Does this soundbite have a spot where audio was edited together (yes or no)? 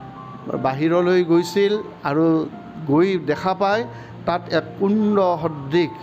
no